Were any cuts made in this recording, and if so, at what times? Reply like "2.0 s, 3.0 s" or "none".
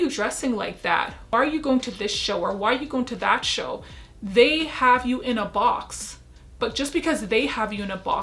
1.3 s